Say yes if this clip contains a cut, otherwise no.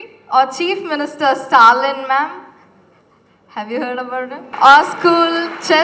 no